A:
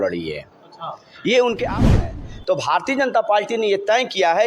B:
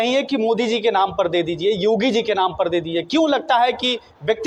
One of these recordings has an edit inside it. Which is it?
A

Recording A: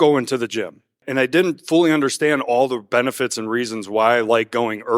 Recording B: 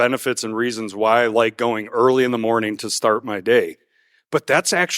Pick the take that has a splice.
A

